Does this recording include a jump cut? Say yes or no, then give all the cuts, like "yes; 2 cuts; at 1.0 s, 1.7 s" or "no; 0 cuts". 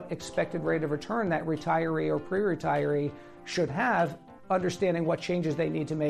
yes; 1 cut; at 4.3 s